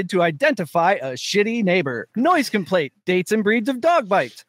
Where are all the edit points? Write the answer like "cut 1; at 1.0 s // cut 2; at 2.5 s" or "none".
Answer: cut 1; at 2.0 s // cut 2; at 2.9 s

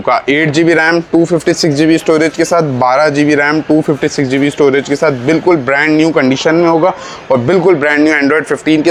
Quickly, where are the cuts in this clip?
none

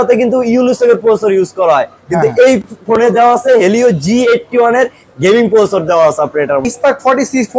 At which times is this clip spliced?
cut 1; at 6.6 s

